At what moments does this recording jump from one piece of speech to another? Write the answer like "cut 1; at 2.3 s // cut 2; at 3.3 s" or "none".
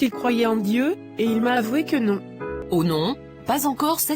cut 1; at 2.5 s